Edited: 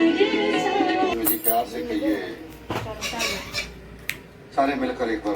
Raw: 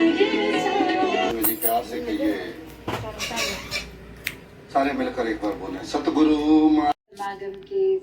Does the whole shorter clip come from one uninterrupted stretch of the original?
no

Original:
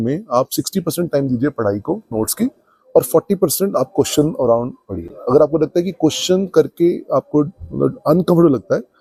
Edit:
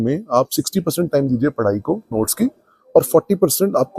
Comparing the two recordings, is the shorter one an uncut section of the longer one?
yes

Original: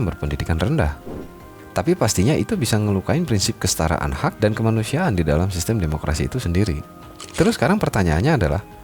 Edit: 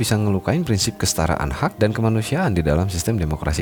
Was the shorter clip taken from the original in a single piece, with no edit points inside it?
yes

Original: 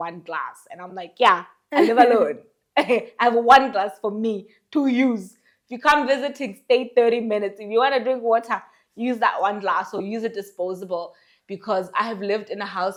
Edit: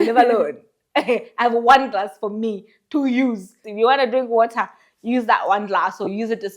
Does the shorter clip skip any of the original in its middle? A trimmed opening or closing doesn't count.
yes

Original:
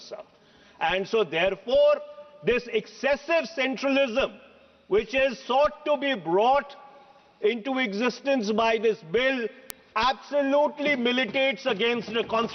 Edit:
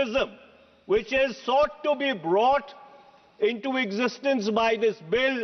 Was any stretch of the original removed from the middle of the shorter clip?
no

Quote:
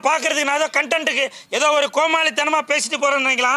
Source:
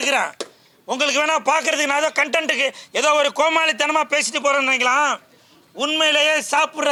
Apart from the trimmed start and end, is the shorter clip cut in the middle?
no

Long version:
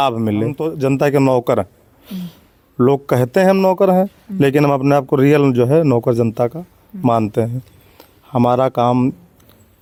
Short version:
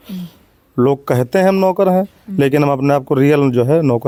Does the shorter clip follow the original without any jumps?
yes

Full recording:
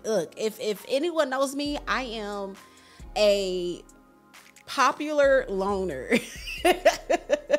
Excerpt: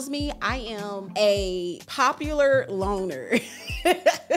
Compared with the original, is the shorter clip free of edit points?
no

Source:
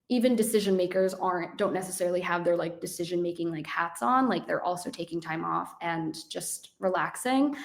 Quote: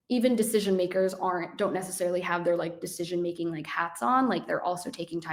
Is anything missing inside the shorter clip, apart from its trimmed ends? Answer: no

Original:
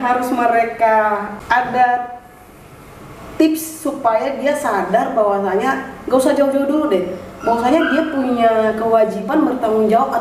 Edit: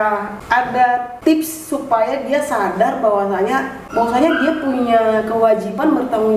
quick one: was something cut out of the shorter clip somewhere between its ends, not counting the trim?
yes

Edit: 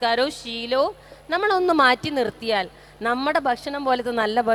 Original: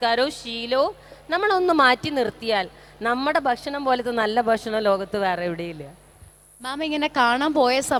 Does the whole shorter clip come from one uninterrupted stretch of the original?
yes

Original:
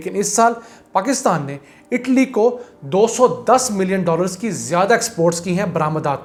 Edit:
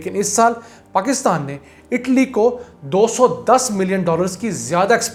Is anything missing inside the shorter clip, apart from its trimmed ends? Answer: no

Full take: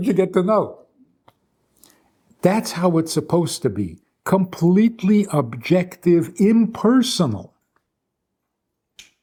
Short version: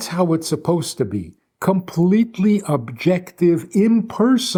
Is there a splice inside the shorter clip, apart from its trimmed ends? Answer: no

